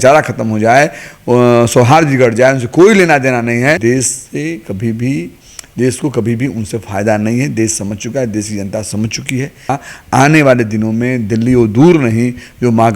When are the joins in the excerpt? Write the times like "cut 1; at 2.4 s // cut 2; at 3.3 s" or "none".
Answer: cut 1; at 3.8 s // cut 2; at 9.7 s